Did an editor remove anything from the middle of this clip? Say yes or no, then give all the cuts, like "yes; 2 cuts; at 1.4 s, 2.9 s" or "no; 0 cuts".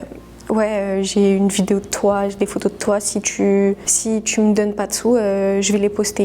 no; 0 cuts